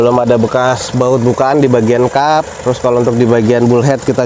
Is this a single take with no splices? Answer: yes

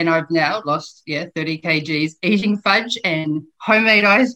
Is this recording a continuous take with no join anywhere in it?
yes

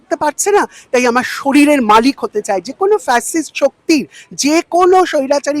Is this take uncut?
yes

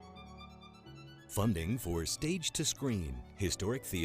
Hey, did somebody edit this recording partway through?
yes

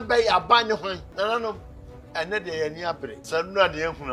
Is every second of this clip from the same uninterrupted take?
no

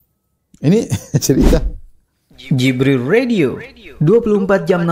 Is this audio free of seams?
no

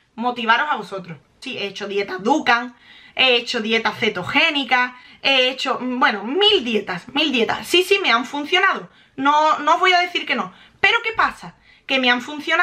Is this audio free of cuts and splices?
no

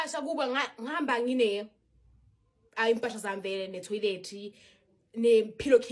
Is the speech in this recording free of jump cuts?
yes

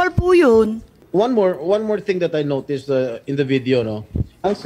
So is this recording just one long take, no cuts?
no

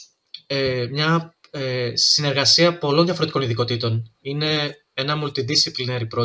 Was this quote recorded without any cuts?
yes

